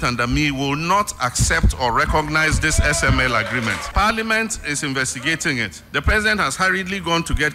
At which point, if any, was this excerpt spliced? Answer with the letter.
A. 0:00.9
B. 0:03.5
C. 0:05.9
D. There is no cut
D